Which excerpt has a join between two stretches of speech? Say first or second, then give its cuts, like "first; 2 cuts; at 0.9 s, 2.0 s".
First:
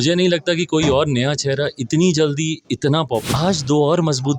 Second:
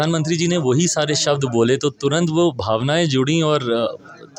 first; 1 cut; at 3.3 s